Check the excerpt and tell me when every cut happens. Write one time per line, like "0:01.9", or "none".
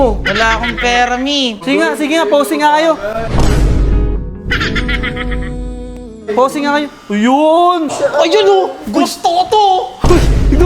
0:01.6
0:07.9